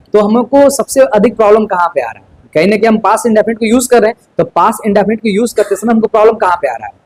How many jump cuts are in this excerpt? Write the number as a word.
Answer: zero